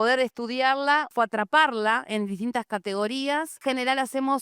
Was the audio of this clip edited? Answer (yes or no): yes